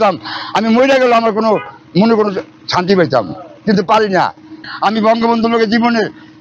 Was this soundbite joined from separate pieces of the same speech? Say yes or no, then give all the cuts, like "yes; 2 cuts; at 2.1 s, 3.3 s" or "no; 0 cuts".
yes; 1 cut; at 4.7 s